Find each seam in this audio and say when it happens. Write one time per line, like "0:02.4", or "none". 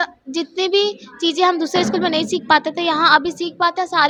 none